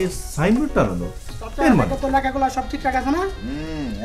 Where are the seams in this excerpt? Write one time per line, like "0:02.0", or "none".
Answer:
0:01.9